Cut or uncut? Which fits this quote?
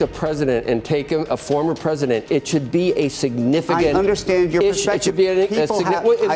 uncut